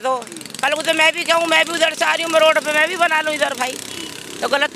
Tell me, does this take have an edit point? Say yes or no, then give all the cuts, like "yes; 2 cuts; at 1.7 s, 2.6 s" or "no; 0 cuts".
no; 0 cuts